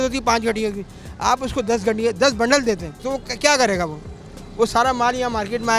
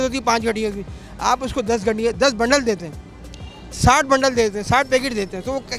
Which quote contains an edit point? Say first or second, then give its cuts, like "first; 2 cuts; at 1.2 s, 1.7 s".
first; 1 cut; at 3.0 s